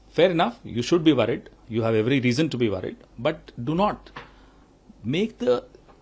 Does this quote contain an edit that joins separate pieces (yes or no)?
no